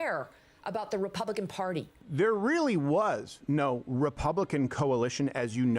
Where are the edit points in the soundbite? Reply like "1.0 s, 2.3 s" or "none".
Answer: 2.0 s